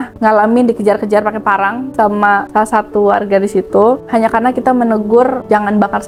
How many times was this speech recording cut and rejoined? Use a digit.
0